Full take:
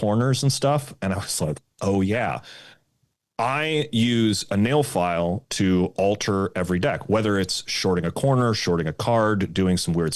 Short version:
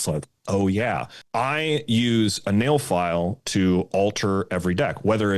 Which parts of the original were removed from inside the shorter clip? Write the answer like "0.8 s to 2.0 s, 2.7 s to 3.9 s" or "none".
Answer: 2.5 s to 3.2 s